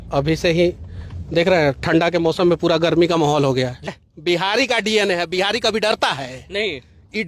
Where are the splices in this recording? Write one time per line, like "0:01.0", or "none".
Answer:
0:03.9